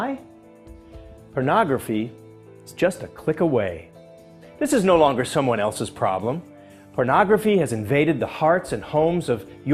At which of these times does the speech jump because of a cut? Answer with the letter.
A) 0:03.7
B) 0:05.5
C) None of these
C